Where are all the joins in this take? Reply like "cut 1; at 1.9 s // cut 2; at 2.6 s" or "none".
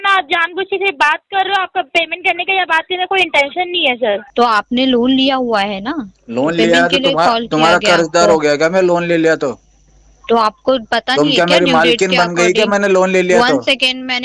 cut 1; at 4.3 s